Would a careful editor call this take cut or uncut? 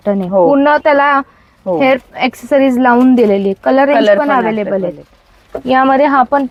uncut